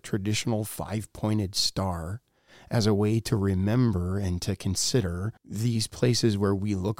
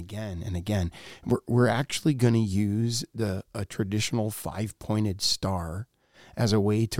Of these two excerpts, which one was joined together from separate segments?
first; 1 cut; at 5.4 s

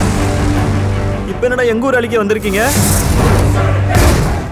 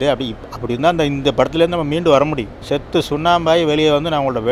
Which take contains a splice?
second; 1 cut; at 2.5 s

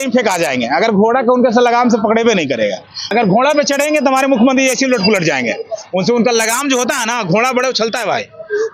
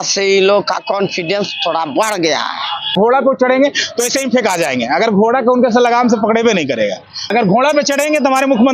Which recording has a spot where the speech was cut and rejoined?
second; 1 cut; at 2.9 s

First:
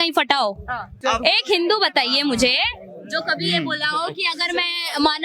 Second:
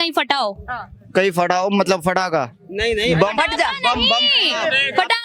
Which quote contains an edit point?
first; 1 cut; at 1.0 s

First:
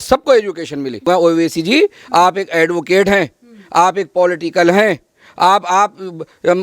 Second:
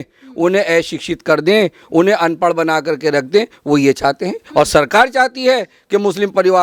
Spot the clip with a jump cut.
first; 1 cut; at 1.1 s

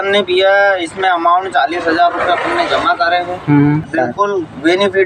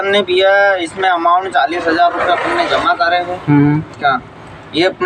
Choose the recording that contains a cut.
first; 1 cut; at 3.9 s

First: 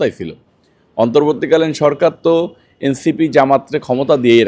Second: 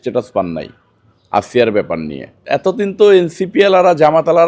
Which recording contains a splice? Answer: second; 1 cut; at 2.4 s

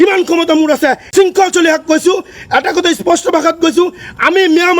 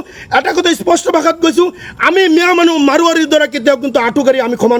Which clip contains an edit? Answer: first; 1 cut; at 1.0 s

